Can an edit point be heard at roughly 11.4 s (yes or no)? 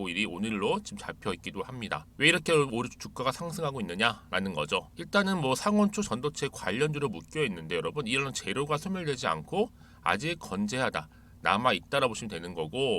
no